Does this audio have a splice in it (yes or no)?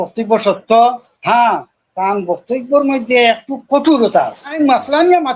yes